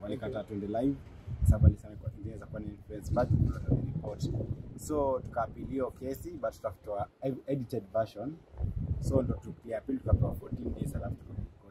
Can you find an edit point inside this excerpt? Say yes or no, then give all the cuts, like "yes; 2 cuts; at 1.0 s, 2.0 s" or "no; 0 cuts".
no; 0 cuts